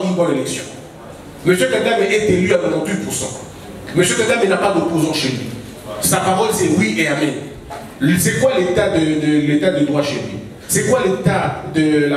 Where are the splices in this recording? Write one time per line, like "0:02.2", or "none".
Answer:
none